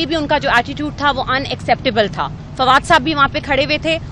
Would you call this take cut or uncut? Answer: uncut